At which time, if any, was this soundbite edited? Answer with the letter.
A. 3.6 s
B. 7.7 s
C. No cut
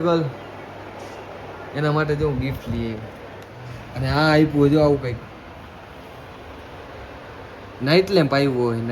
A